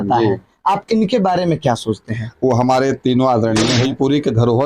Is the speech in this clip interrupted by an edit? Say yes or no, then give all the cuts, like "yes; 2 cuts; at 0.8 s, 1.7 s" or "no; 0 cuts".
yes; 1 cut; at 3.7 s